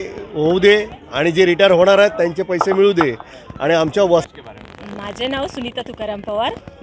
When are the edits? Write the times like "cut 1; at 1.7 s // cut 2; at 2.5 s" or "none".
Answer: cut 1; at 4.2 s